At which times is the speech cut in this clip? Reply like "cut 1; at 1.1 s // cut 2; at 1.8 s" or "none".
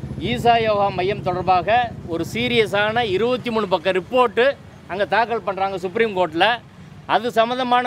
none